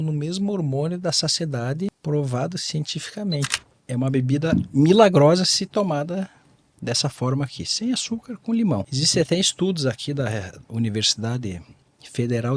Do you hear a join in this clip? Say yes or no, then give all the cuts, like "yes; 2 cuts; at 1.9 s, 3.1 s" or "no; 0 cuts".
yes; 3 cuts; at 2.0 s, 3.7 s, 8.7 s